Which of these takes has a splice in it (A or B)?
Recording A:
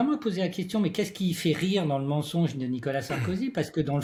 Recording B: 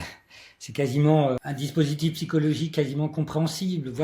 B